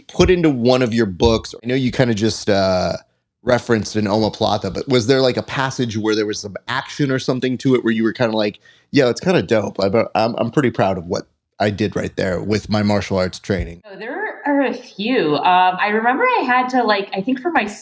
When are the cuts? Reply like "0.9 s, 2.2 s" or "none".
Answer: 1.6 s, 14.0 s